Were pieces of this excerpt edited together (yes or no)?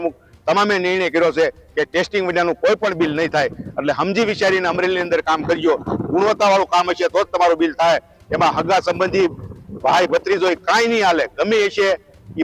no